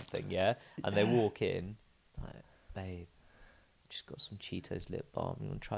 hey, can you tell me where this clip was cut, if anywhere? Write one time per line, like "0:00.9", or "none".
none